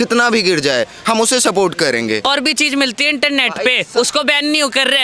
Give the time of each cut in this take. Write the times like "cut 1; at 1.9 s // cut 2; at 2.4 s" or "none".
cut 1; at 2.2 s